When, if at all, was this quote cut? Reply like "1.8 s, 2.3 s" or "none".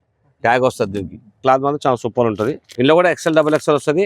1.4 s, 2.6 s